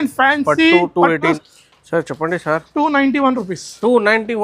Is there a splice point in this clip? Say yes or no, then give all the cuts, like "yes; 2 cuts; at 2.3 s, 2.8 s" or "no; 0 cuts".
yes; 1 cut; at 1.4 s